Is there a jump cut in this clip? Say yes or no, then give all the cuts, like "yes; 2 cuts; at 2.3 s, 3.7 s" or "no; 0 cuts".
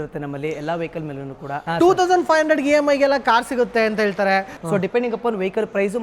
yes; 2 cuts; at 1.6 s, 4.5 s